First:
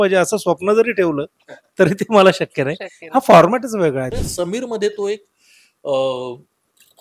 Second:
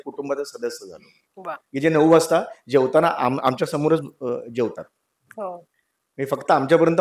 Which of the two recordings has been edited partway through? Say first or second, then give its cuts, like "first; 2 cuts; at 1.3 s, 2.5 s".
first; 1 cut; at 4.0 s